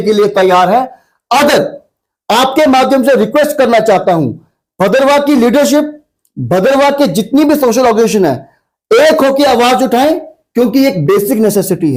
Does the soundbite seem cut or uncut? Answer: uncut